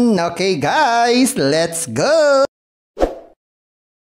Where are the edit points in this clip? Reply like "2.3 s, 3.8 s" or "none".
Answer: none